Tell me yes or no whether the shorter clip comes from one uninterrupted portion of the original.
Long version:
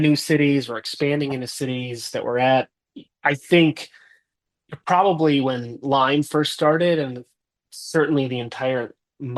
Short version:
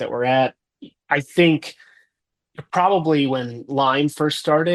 yes